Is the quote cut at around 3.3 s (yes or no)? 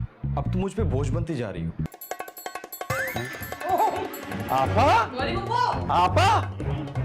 no